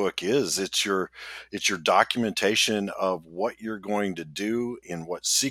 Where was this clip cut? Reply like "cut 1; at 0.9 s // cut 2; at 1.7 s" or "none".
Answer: none